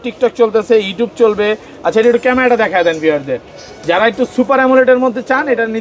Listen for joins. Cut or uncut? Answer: uncut